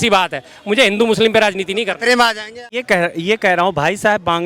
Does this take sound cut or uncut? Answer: cut